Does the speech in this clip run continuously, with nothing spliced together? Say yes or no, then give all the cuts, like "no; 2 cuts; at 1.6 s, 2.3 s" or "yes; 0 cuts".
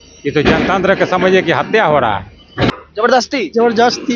no; 1 cut; at 2.7 s